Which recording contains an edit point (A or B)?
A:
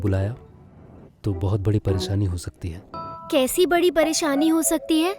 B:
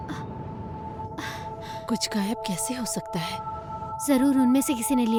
A